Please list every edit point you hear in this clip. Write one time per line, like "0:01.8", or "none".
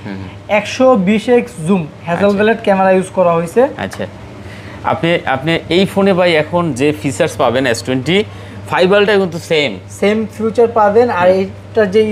none